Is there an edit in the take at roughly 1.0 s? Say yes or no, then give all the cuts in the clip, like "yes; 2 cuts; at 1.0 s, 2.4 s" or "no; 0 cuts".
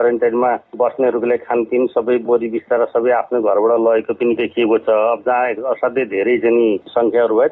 no; 0 cuts